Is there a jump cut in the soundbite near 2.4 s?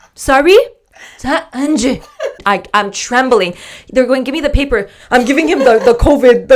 yes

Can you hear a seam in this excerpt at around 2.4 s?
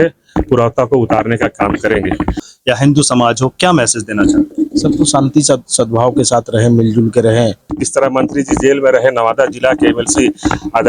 yes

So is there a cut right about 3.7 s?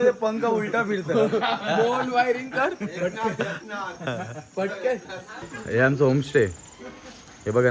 no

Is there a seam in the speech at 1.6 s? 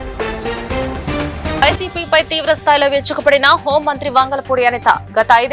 yes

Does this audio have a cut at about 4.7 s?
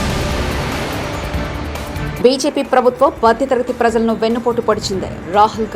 no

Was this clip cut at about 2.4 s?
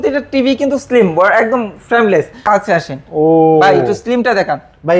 yes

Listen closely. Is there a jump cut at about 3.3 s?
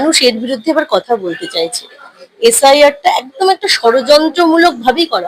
no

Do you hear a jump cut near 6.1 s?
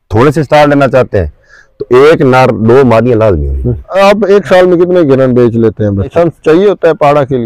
yes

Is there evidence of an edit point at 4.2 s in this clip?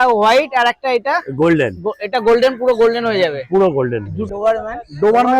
yes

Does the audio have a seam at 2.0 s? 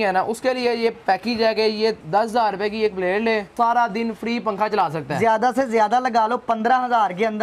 yes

